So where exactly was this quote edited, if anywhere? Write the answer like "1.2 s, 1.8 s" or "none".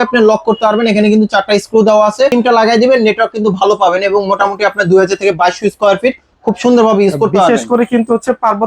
2.3 s